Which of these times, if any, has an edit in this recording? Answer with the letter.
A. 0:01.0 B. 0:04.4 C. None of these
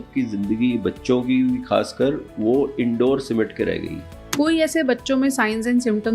B